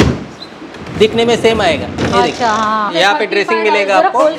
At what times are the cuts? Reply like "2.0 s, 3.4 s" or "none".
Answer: 2.9 s

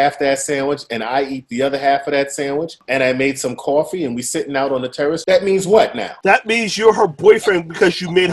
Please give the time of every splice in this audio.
2.8 s, 5.2 s, 6.1 s

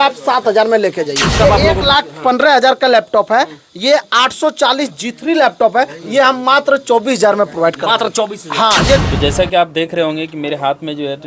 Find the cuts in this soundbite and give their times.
1.4 s, 9.1 s

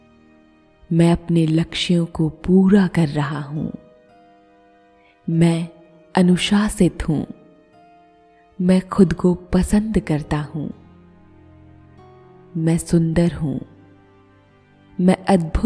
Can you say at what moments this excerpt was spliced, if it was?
3.8 s, 5.2 s

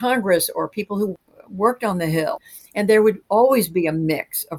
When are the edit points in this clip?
1.1 s, 2.5 s

